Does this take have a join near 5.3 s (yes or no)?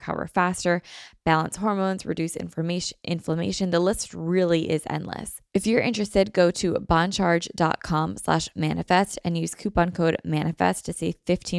yes